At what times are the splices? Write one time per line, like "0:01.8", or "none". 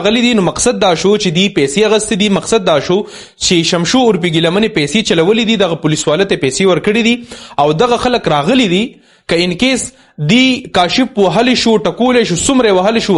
none